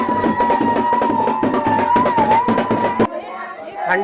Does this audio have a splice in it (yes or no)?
yes